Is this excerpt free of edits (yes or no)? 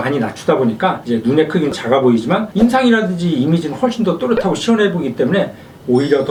yes